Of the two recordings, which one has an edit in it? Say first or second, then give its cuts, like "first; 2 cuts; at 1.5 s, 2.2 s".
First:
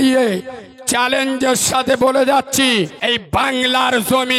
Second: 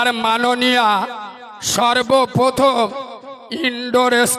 first; 1 cut; at 3.0 s